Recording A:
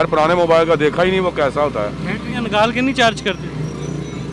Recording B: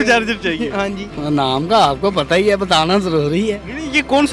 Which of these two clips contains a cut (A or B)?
B